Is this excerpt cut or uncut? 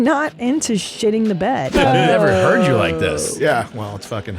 cut